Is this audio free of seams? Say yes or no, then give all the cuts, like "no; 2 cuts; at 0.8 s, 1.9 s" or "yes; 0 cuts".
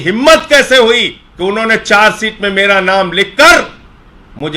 no; 1 cut; at 1.2 s